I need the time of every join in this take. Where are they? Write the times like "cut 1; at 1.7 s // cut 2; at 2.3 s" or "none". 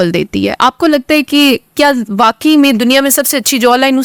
none